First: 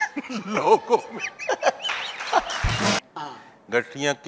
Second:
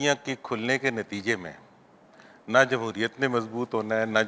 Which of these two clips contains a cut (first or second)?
first